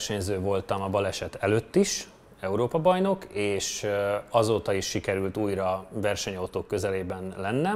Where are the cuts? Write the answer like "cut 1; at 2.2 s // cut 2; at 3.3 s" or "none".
none

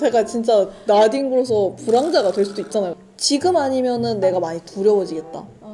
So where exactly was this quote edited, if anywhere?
cut 1; at 2.9 s

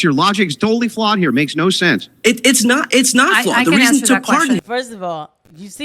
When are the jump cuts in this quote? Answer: cut 1; at 4.6 s

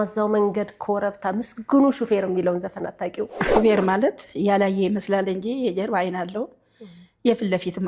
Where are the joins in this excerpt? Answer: cut 1; at 3.5 s

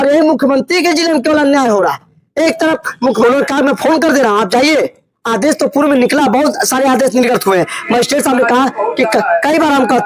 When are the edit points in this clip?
cut 1; at 3.2 s

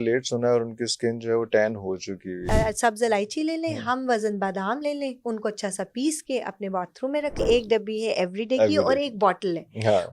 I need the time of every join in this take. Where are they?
cut 1; at 2.5 s // cut 2; at 7.4 s

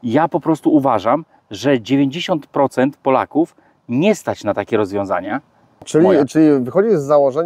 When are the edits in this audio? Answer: cut 1; at 5.9 s

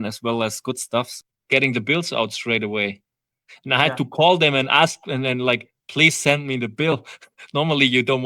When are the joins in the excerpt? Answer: cut 1; at 1.1 s

